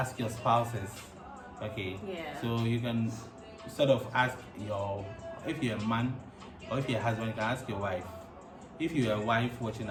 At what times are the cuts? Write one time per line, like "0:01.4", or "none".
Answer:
none